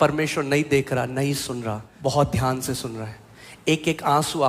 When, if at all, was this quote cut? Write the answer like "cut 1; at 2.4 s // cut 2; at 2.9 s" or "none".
cut 1; at 1.8 s

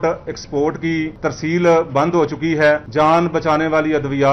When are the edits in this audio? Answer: cut 1; at 1.1 s // cut 2; at 2.9 s

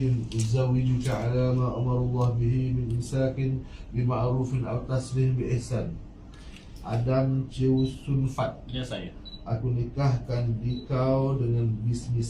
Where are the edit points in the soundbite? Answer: none

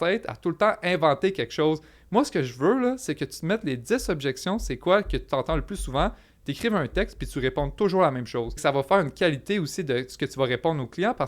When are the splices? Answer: cut 1; at 8.6 s

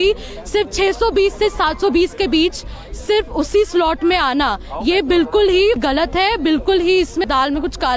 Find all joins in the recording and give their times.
cut 1; at 5.8 s // cut 2; at 7.2 s

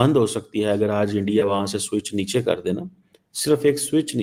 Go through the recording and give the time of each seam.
none

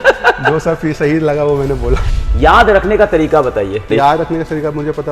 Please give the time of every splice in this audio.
cut 1; at 2.1 s // cut 2; at 3.9 s

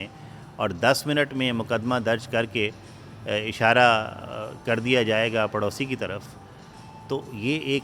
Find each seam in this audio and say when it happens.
none

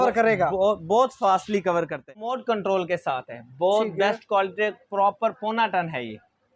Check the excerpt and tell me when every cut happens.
cut 1; at 2.3 s

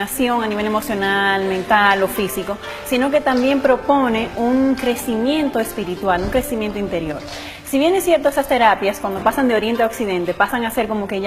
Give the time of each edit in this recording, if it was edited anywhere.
cut 1; at 2.0 s

